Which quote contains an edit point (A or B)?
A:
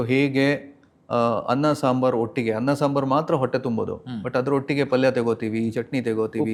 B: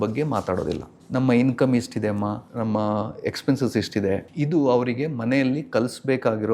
B